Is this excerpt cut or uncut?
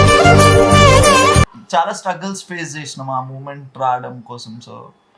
cut